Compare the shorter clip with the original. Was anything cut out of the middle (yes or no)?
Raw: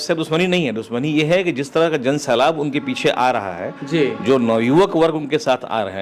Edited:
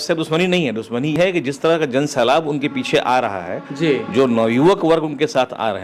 yes